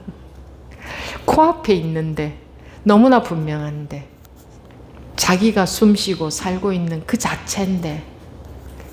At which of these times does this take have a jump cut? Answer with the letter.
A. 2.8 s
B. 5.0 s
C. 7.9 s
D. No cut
B